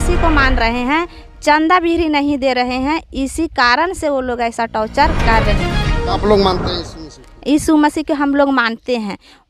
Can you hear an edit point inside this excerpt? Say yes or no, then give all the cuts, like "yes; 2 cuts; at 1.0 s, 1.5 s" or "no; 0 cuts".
no; 0 cuts